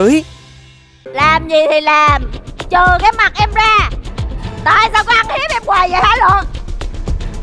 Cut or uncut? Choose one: cut